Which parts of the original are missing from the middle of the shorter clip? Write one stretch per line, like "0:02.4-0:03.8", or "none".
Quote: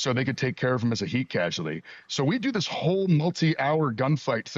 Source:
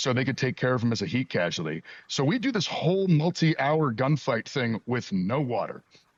none